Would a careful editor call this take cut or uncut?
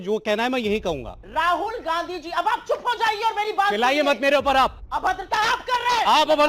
cut